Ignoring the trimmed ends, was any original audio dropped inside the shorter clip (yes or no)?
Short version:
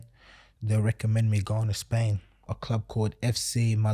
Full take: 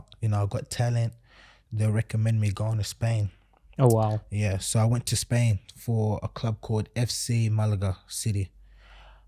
yes